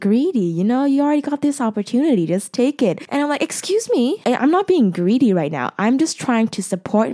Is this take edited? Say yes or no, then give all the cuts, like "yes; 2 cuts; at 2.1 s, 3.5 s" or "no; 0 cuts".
yes; 2 cuts; at 3.0 s, 4.2 s